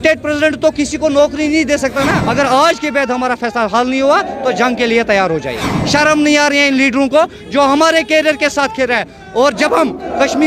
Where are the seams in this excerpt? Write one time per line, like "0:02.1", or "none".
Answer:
0:02.2
0:05.7